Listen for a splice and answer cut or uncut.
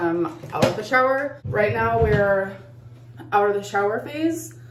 uncut